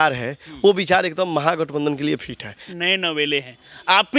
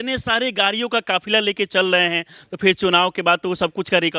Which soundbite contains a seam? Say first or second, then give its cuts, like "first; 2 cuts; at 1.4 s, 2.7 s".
first; 1 cut; at 2.7 s